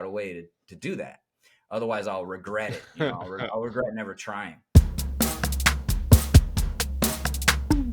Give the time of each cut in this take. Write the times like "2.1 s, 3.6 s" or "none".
4.6 s